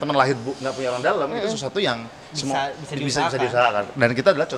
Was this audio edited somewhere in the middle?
no; 0 cuts

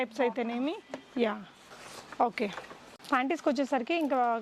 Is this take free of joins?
yes; 0 cuts

